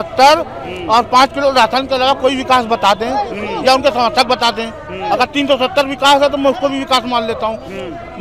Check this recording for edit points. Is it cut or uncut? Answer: uncut